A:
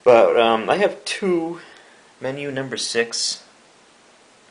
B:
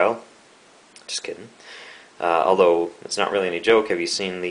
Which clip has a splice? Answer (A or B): B